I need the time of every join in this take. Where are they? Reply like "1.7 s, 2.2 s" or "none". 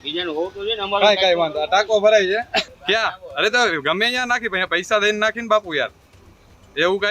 2.7 s